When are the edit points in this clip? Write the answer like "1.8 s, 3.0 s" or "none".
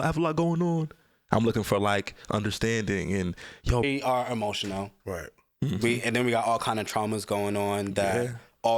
3.8 s